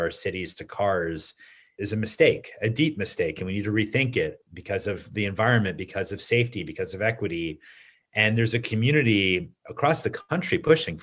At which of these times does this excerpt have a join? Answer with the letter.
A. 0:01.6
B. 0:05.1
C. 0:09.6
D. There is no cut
A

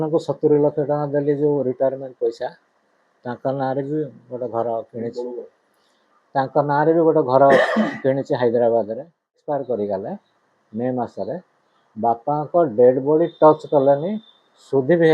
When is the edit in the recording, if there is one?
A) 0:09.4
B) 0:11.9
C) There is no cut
A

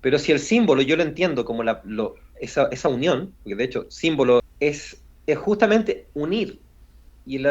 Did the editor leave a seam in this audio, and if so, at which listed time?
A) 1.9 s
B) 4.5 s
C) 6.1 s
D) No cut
B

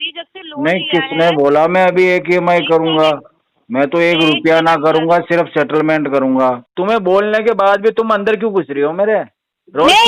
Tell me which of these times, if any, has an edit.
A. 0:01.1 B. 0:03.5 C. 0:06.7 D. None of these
C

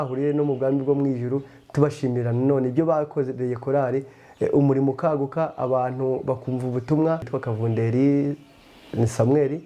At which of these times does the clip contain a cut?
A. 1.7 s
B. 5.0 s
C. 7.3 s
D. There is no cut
C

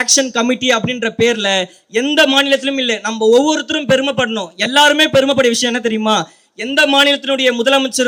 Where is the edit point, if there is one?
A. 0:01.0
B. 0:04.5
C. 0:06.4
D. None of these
D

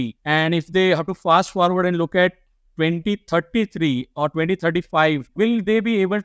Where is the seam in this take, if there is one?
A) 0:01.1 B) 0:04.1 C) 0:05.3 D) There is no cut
C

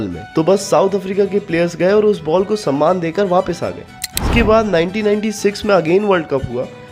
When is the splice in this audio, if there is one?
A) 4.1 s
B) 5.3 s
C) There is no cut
A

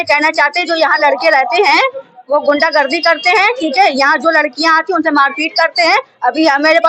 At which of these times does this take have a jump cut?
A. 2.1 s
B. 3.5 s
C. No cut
C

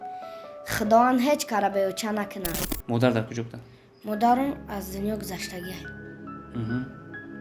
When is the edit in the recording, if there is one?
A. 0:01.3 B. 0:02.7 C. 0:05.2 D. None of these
B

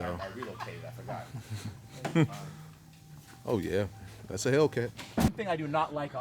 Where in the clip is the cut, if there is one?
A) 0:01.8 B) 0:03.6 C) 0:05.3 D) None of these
C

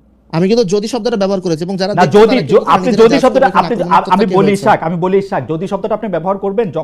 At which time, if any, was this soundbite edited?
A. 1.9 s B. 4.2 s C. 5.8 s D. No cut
D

